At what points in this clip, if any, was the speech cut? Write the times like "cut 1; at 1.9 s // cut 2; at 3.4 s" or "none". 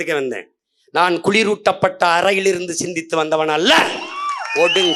none